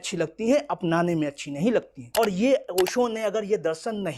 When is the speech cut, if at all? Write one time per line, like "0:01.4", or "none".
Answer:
0:02.0